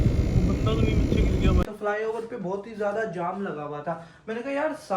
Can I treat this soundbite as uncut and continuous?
no; 1 cut; at 1.6 s

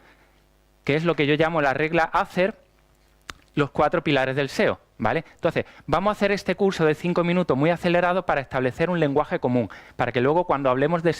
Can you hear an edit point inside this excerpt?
yes; 1 cut; at 9.8 s

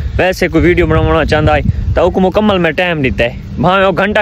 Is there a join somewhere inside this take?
no; 0 cuts

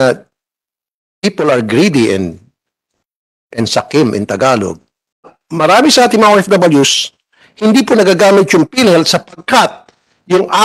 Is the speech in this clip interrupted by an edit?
yes; 1 cut; at 5.4 s

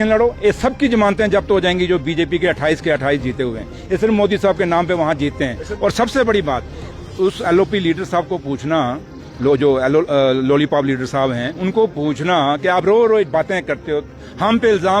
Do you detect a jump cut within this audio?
no; 0 cuts

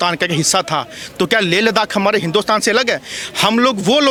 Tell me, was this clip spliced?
no; 0 cuts

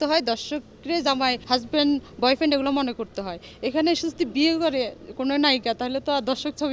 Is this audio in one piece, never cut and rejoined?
yes; 0 cuts

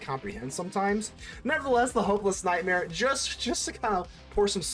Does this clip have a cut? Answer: yes; 1 cut; at 1.2 s

